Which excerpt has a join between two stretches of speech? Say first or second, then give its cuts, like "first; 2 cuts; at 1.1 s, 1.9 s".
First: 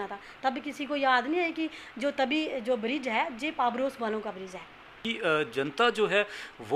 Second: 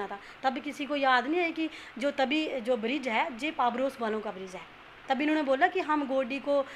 first; 1 cut; at 4.9 s